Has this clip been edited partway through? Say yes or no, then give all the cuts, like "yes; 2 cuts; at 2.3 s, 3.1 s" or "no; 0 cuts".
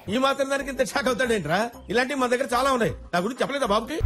no; 0 cuts